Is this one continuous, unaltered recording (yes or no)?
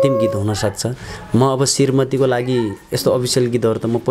yes